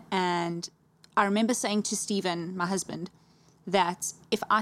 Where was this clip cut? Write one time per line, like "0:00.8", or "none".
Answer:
none